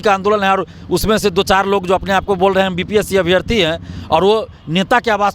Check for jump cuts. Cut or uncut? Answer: uncut